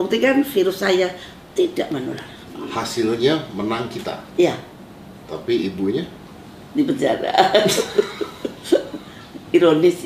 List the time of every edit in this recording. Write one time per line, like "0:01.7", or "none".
0:02.5